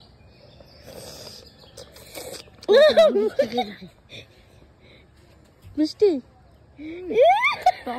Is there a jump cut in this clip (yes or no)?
no